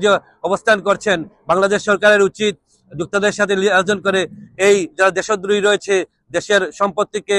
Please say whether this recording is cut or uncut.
uncut